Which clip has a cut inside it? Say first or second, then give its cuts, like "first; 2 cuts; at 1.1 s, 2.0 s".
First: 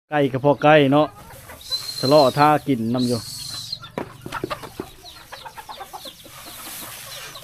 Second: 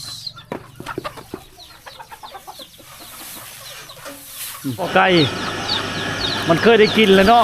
second; 1 cut; at 4.9 s